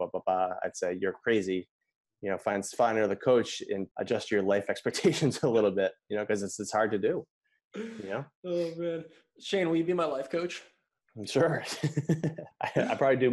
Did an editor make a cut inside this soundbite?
yes; 2 cuts; at 3.9 s, 12.3 s

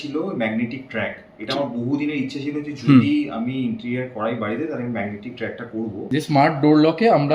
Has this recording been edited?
yes; 1 cut; at 6.0 s

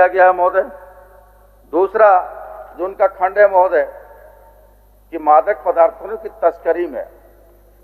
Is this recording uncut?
yes; 0 cuts

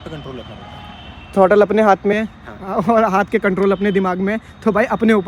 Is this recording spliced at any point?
no; 0 cuts

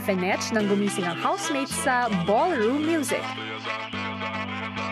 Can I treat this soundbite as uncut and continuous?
yes; 0 cuts

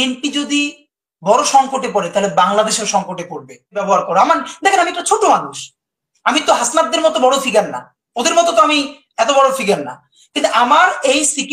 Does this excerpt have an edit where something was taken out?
yes; 1 cut; at 3.8 s

